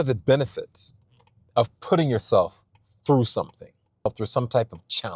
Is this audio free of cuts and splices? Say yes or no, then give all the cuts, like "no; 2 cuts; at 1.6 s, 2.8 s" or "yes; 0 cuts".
no; 1 cut; at 4.1 s